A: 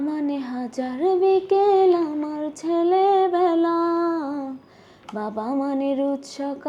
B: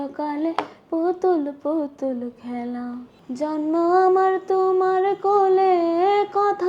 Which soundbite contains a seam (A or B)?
B